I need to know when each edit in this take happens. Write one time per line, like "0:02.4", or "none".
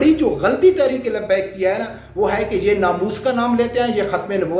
none